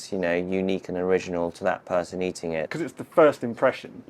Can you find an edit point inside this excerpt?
yes; 1 cut; at 2.7 s

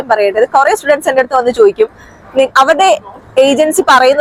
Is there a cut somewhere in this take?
no; 0 cuts

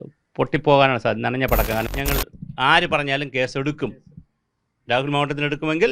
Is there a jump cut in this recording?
yes; 1 cut; at 1.9 s

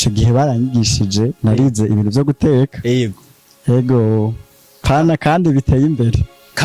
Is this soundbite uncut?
yes; 0 cuts

